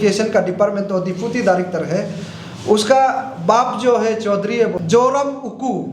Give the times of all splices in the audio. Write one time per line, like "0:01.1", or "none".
0:04.8